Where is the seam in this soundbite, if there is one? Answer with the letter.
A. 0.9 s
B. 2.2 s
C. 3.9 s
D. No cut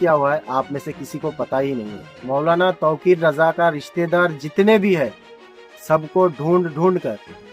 B